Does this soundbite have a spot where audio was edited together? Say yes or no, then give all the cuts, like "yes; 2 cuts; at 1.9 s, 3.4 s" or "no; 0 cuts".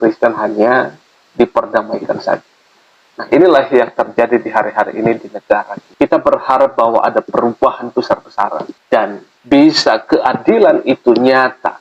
no; 0 cuts